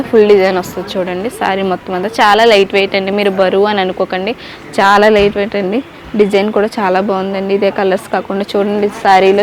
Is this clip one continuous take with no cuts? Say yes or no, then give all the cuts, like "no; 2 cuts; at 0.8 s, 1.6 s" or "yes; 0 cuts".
yes; 0 cuts